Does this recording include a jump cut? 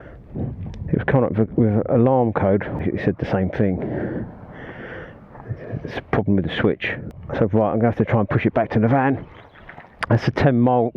yes; 2 cuts; at 2.8 s, 7.2 s

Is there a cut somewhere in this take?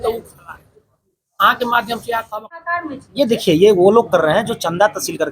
yes; 1 cut; at 2.7 s

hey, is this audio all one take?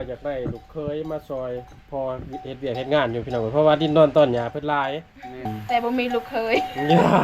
no; 1 cut; at 5.5 s

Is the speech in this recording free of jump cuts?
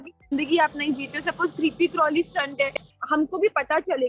no; 1 cut; at 2.9 s

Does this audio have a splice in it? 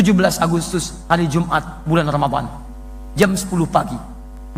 no; 0 cuts

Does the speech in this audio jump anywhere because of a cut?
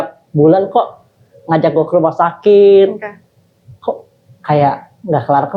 no; 0 cuts

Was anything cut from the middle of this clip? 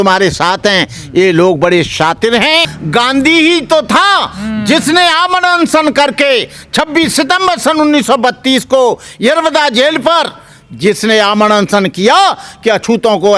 yes; 1 cut; at 2.8 s

